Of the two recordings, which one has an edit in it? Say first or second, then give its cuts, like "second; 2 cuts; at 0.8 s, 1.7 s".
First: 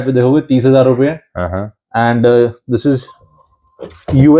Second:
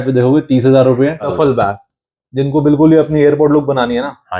second; 1 cut; at 1.3 s